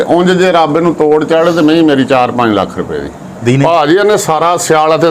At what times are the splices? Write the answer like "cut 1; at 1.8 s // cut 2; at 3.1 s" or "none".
cut 1; at 3.4 s